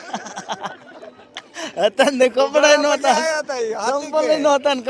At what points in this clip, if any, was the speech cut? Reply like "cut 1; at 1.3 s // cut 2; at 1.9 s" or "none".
none